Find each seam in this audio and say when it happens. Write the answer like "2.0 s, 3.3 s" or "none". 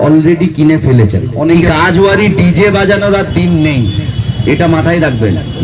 1.5 s